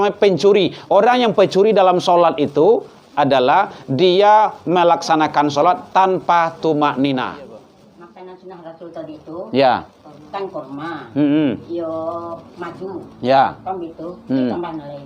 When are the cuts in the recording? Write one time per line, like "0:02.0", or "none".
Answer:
0:07.8